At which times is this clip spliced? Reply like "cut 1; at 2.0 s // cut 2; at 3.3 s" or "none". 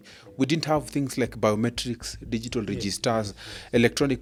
none